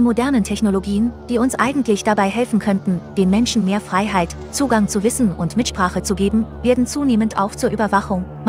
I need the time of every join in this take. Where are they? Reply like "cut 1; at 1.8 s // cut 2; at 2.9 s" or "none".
none